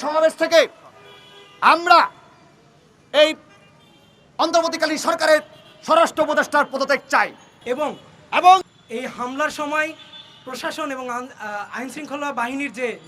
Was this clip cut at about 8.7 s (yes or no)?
yes